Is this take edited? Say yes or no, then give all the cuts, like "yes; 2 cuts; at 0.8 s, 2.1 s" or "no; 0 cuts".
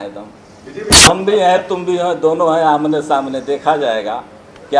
yes; 1 cut; at 1.0 s